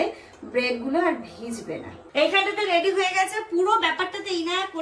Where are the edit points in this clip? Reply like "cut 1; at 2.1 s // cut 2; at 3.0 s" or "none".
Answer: none